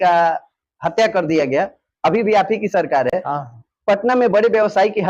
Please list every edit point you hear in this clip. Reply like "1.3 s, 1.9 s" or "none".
none